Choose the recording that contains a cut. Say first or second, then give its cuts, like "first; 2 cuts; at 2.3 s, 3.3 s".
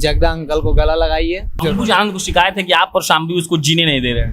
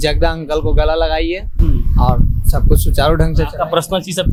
first; 1 cut; at 1.5 s